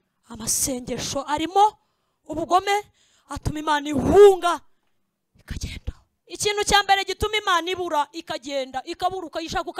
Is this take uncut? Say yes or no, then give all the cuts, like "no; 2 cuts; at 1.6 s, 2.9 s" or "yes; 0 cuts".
no; 1 cut; at 6.1 s